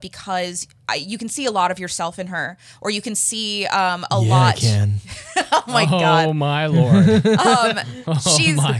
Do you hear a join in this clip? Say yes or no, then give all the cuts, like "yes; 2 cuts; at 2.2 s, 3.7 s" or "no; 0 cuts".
no; 0 cuts